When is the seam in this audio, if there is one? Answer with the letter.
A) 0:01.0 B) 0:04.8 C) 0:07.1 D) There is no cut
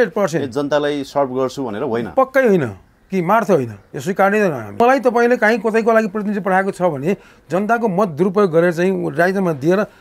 B